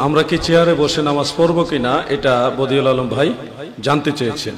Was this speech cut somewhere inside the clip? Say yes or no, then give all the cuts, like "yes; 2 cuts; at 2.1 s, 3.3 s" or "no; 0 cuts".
no; 0 cuts